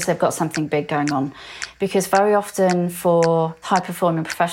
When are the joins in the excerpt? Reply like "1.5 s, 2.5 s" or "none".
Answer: 3.6 s